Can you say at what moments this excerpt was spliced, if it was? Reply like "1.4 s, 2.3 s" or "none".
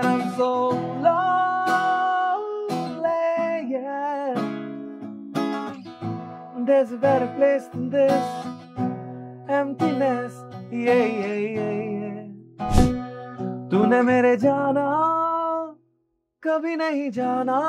12.8 s